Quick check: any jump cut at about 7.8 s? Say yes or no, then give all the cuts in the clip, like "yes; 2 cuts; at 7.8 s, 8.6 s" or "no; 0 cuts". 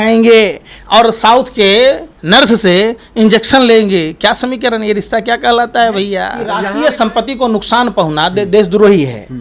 no; 2 cuts; at 2.1 s, 6.4 s